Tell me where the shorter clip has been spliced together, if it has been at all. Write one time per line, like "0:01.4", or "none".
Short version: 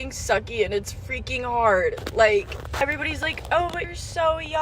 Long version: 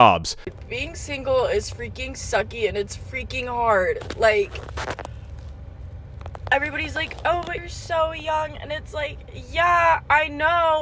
0:02.8